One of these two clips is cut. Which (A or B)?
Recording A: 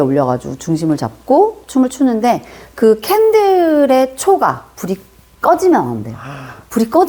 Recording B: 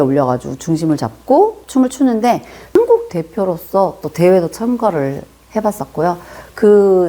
B